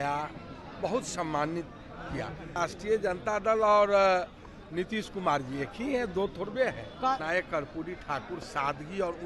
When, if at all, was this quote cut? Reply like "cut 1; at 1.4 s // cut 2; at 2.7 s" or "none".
cut 1; at 2.6 s // cut 2; at 7.2 s